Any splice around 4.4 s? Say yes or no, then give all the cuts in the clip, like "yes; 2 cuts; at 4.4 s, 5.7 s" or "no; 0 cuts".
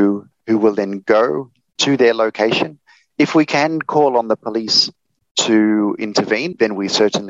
no; 2 cuts; at 1.8 s, 6.2 s